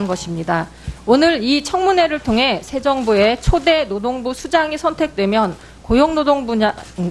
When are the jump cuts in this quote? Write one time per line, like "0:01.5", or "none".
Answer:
0:06.1